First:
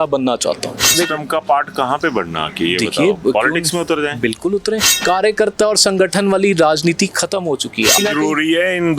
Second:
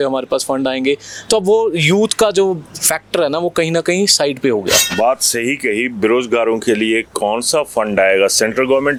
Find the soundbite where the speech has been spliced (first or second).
first